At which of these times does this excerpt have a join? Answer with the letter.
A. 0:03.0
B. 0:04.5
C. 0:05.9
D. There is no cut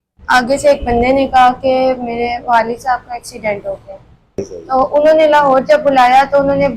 B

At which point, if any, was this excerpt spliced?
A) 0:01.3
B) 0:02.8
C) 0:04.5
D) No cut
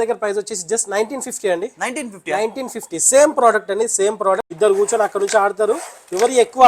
C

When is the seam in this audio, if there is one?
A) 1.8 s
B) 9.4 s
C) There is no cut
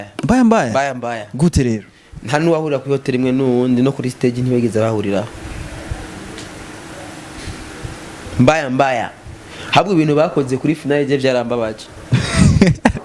C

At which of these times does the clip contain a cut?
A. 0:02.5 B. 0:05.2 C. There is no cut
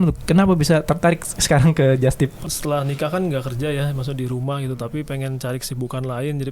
A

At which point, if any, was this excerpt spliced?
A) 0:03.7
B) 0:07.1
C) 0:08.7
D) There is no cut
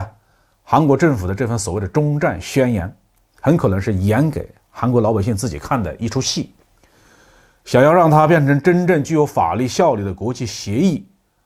D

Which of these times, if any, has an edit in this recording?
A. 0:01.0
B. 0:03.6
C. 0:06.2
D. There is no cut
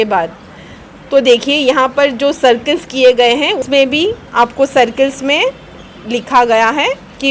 B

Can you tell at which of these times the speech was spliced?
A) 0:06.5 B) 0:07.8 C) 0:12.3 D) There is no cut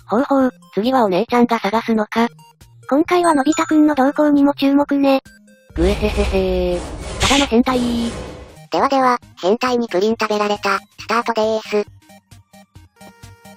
B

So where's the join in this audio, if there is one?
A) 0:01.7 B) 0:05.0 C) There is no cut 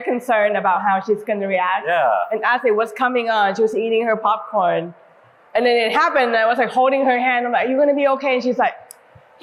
C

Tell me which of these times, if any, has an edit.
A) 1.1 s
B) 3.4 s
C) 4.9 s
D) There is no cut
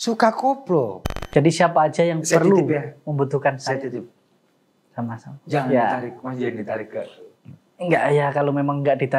A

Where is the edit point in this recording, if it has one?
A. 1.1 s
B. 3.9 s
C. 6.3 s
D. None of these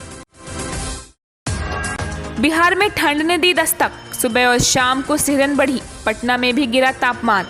A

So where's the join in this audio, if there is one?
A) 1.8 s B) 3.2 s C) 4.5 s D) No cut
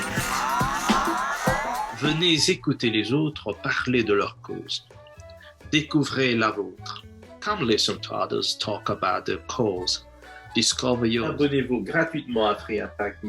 A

